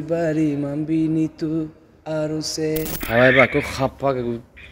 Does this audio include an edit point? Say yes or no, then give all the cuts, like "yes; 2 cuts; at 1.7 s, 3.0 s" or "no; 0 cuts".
yes; 1 cut; at 3.0 s